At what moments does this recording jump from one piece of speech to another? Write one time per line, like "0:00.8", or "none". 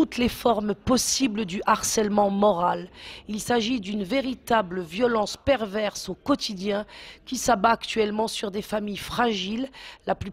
none